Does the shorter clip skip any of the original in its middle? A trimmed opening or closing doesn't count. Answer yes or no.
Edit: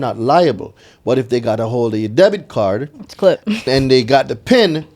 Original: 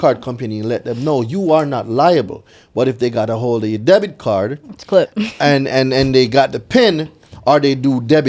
yes